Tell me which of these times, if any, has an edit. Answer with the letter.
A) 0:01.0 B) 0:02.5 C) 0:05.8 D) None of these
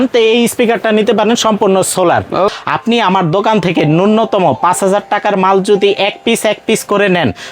B